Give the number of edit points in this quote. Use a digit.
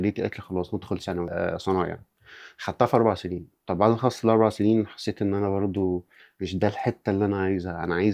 1